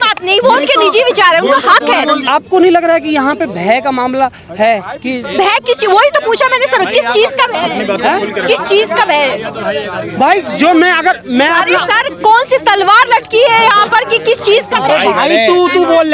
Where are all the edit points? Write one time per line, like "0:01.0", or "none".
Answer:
0:02.2